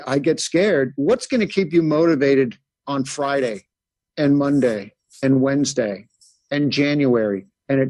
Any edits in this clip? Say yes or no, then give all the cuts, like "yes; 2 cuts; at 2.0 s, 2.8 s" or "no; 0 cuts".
yes; 1 cut; at 0.9 s